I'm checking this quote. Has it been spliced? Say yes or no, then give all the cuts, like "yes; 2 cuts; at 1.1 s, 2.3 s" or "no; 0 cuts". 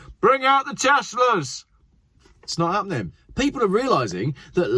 yes; 1 cut; at 3.2 s